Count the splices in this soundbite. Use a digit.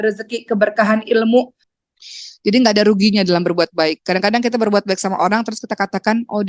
1